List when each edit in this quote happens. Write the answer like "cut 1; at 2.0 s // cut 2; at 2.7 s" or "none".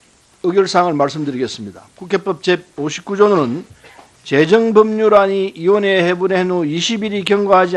cut 1; at 6.4 s